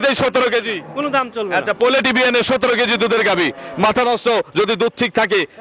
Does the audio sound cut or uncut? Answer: uncut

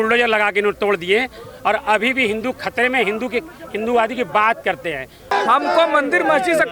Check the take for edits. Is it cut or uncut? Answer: cut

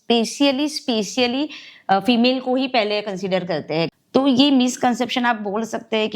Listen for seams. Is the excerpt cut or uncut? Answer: cut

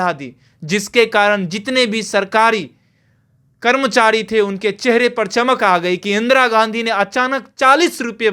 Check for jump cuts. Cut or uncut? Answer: uncut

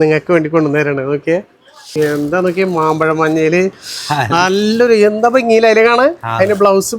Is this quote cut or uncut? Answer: cut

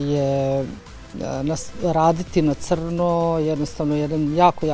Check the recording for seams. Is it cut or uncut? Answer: uncut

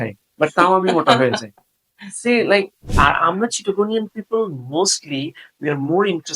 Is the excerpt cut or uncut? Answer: cut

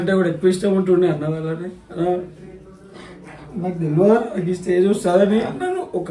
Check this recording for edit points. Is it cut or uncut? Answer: uncut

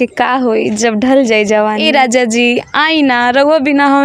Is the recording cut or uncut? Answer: cut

